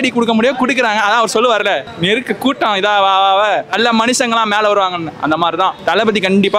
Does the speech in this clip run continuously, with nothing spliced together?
yes; 0 cuts

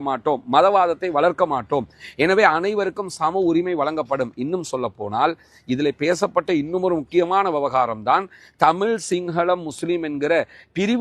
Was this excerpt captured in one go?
yes; 0 cuts

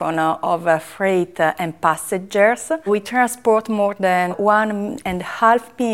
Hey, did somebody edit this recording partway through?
yes; 2 cuts; at 2.9 s, 4.4 s

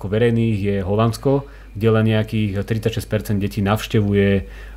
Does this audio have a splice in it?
no; 0 cuts

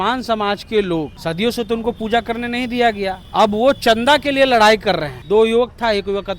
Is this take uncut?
no; 3 cuts; at 1.1 s, 3.2 s, 5.1 s

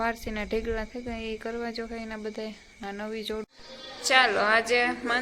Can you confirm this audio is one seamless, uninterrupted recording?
no; 1 cut; at 3.4 s

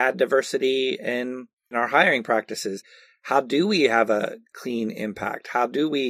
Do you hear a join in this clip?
yes; 2 cuts; at 1.7 s, 4.5 s

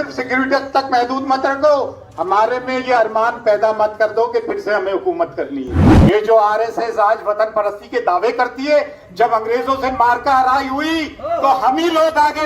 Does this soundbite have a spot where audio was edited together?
yes; 1 cut; at 5.9 s

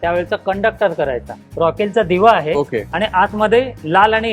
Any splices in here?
yes; 1 cut; at 1.4 s

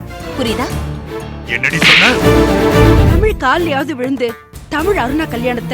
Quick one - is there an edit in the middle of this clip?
yes; 1 cut; at 3.1 s

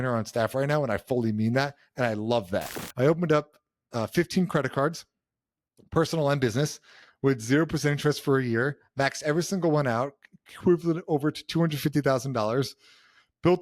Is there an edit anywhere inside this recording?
yes; 1 cut; at 2.8 s

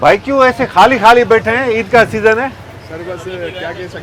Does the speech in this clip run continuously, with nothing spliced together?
yes; 0 cuts

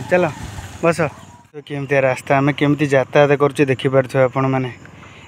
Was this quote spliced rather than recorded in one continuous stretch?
no; 0 cuts

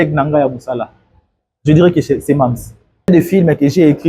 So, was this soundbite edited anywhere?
yes; 1 cut; at 3.1 s

